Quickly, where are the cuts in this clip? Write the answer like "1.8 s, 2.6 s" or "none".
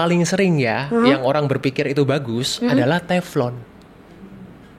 none